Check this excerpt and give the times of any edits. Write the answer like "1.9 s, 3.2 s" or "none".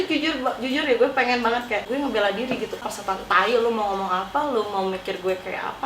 1.8 s, 2.8 s

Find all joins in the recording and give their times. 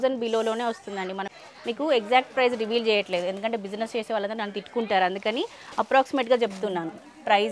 1.3 s

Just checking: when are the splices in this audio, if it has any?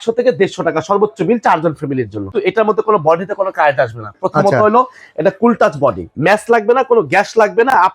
2.3 s, 6.1 s

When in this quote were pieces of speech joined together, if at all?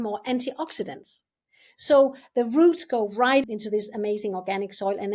3.4 s

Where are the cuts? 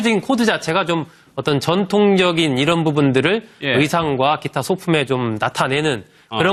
none

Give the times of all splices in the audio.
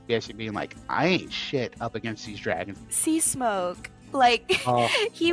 2.8 s

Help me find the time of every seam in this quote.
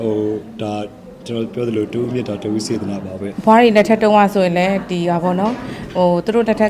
3.4 s

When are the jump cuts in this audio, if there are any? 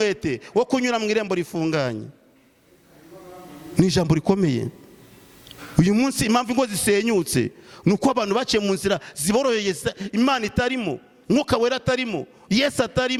none

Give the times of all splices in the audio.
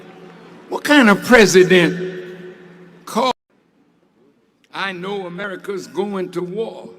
3.3 s

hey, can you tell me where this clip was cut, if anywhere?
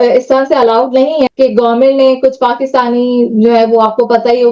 1.3 s

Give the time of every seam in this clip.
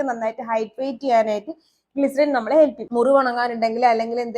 2.8 s

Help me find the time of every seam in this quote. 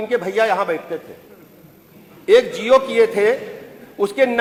none

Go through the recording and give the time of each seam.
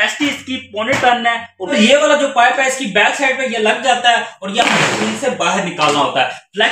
1.5 s

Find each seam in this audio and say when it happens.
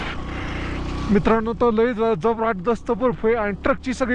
none

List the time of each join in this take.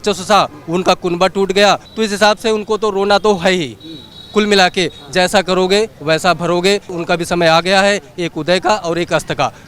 1.9 s, 6.9 s

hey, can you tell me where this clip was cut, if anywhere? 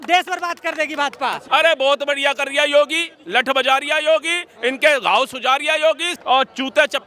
1.4 s

